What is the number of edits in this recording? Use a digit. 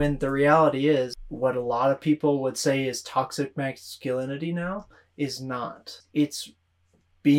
2